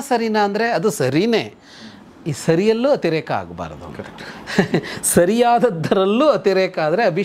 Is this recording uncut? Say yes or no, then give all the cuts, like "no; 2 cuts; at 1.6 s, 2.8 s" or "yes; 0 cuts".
yes; 0 cuts